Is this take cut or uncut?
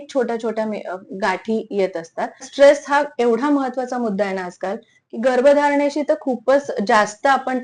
cut